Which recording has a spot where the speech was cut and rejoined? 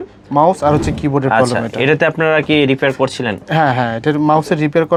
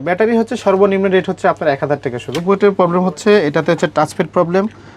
second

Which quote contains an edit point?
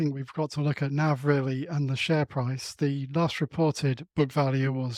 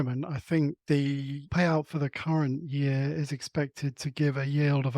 second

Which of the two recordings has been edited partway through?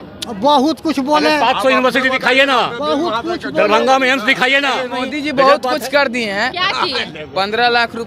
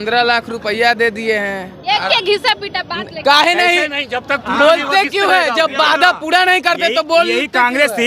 first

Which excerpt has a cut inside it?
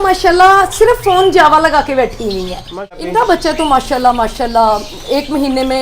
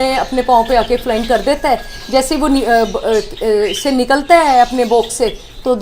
first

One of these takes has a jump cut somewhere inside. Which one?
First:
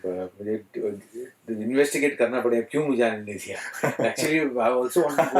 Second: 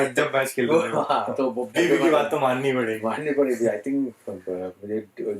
second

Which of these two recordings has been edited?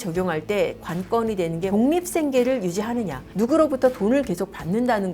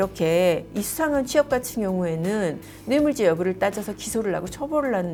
first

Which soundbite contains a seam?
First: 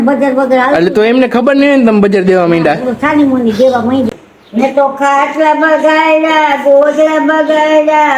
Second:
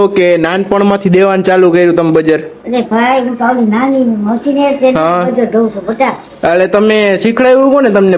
first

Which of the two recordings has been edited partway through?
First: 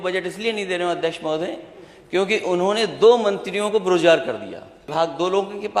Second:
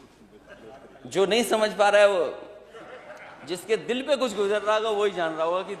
first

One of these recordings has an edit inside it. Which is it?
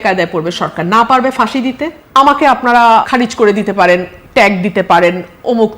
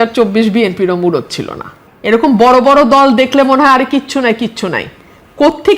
first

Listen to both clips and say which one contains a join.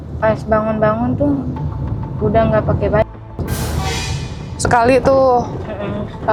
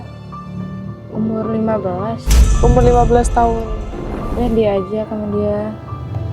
second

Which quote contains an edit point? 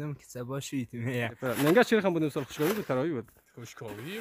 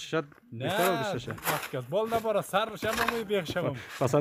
first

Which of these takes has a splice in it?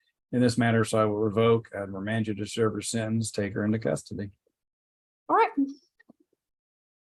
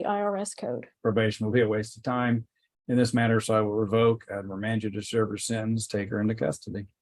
second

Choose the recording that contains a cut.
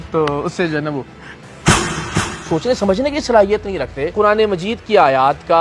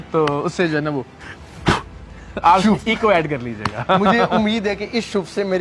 first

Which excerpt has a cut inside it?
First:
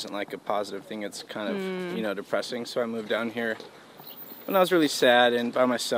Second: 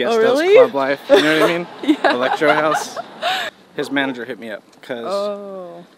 second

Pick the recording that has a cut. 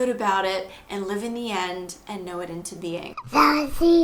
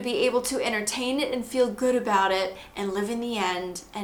first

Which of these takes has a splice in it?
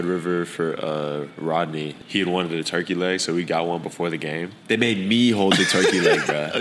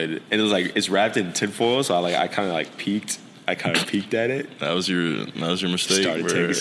first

